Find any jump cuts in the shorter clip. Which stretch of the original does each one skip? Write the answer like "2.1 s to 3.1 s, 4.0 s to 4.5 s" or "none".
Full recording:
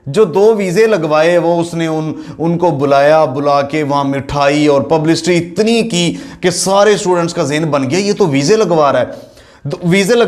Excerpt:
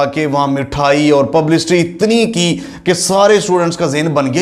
none